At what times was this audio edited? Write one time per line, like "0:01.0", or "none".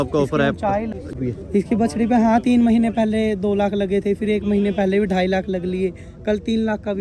0:01.1